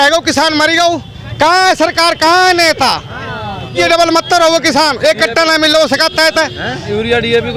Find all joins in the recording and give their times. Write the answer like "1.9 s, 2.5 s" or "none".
3.8 s